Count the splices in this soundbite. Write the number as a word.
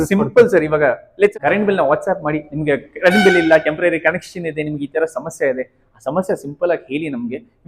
one